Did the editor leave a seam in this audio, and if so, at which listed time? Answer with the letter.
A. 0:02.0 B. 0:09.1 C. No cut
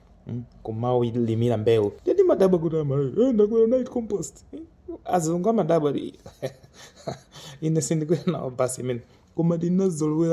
A